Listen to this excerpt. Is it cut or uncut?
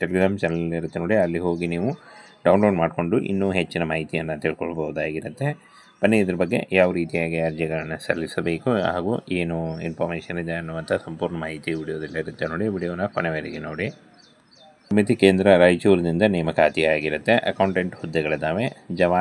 cut